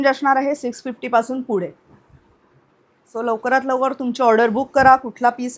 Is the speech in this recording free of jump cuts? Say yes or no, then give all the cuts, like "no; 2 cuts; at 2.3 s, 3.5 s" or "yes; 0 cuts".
yes; 0 cuts